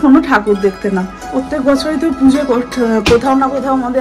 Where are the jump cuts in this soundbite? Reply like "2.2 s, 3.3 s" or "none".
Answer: 1.3 s